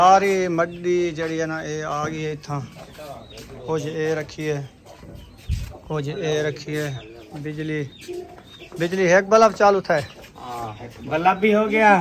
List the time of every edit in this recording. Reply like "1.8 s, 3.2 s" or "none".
none